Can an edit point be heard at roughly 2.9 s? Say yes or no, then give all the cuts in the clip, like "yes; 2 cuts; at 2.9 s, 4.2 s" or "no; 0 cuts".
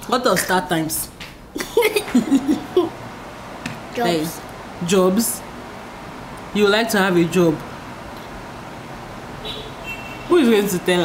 yes; 1 cut; at 2.9 s